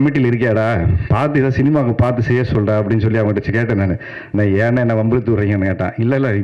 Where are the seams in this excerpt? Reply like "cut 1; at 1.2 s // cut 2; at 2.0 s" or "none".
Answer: none